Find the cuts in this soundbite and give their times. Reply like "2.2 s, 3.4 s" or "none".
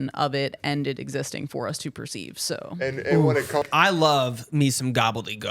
3.6 s